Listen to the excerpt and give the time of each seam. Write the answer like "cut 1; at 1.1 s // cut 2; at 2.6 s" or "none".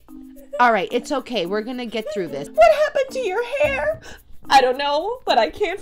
cut 1; at 2.4 s

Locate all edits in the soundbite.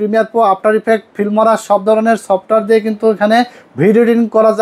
none

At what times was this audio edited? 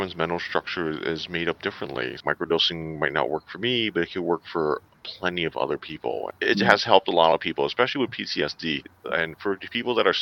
cut 1; at 2.2 s // cut 2; at 6.3 s // cut 3; at 8.9 s

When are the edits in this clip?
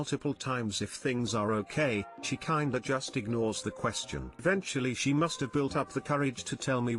cut 1; at 4.4 s

